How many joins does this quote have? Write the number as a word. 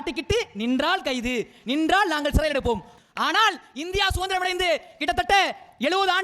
one